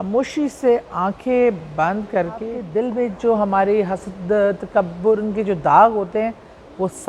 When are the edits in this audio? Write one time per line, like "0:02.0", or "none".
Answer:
0:02.6